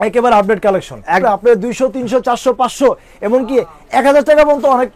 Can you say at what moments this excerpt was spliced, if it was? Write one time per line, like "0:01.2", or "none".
0:01.2